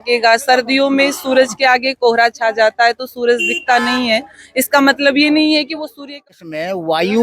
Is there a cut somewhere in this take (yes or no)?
yes